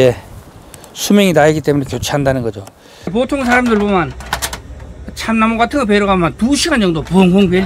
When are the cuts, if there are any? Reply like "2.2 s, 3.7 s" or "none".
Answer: 3.1 s